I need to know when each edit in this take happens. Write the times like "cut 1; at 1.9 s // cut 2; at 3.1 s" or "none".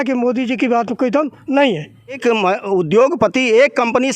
cut 1; at 2.2 s